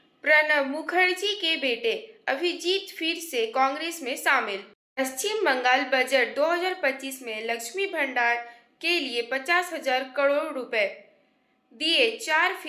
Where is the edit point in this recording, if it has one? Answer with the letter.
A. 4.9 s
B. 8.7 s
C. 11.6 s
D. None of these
A